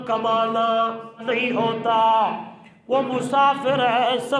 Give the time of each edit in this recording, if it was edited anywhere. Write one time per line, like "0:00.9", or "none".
0:01.2